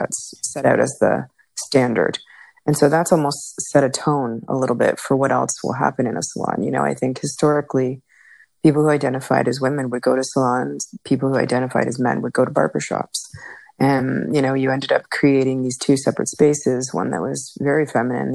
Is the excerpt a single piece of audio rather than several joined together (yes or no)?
yes